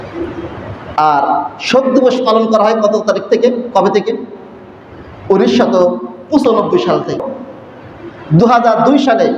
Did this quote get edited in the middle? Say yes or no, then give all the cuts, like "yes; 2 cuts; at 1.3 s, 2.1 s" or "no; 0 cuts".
yes; 1 cut; at 7.2 s